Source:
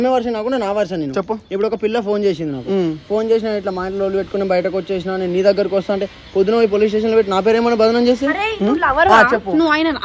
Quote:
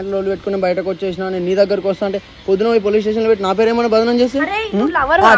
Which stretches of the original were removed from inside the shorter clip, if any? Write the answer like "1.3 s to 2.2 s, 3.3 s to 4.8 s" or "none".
none